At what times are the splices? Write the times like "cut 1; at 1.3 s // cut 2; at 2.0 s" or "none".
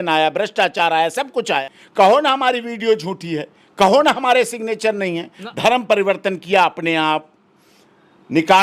cut 1; at 1.8 s // cut 2; at 5.4 s